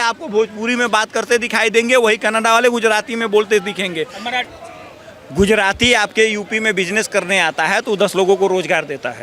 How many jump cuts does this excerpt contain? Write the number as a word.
one